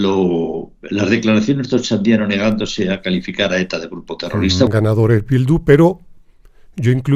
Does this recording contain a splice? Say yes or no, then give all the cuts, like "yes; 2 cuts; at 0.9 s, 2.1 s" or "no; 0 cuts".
yes; 1 cut; at 4.7 s